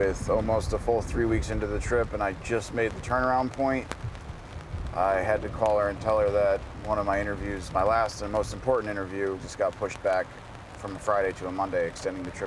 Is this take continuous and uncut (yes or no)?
no